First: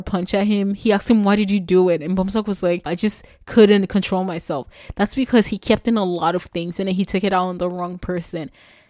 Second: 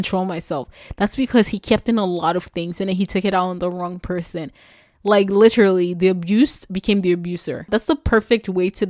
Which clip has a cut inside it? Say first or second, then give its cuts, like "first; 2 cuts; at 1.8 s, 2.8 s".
first; 1 cut; at 2.9 s